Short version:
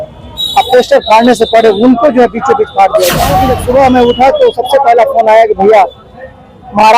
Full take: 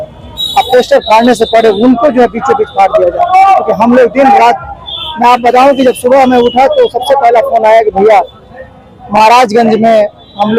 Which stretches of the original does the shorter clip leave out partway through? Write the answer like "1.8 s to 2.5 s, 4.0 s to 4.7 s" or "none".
3.4 s to 5.8 s